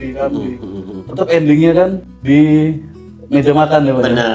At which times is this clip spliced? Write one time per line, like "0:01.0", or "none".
0:02.1